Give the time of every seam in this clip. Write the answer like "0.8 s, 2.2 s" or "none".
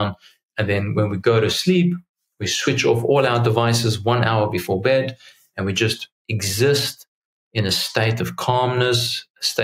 none